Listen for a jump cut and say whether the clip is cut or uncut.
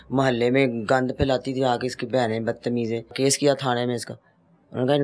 cut